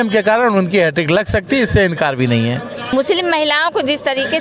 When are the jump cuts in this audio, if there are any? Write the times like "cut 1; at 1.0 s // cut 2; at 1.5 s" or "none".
cut 1; at 2.8 s